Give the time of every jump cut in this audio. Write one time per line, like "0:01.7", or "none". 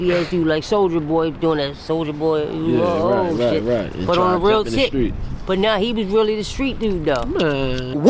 none